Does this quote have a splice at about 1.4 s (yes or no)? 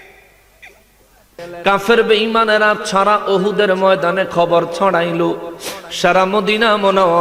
yes